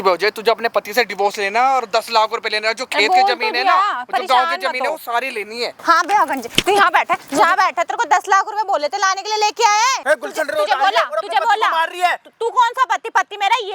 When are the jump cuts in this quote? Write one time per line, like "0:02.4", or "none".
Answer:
0:05.8
0:10.0